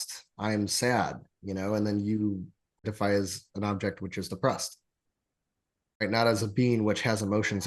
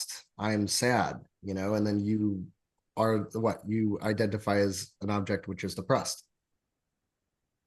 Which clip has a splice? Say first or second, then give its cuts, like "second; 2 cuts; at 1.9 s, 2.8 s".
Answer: first; 2 cuts; at 2.9 s, 6.0 s